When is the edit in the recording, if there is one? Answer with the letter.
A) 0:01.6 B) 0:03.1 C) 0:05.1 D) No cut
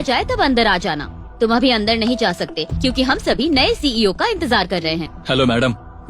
C